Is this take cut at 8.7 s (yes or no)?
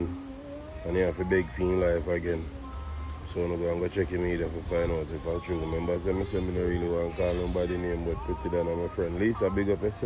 no